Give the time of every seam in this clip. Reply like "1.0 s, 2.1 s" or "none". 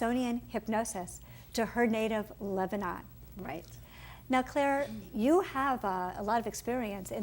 none